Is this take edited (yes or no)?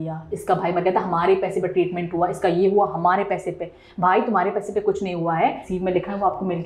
yes